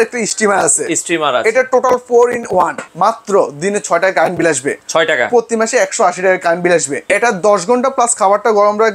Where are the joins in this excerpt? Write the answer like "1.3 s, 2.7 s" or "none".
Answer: 2.8 s, 7.0 s